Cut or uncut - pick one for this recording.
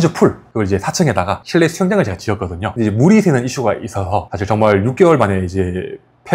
cut